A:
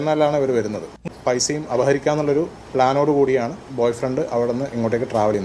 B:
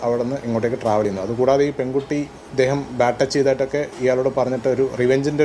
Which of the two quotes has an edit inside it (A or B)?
A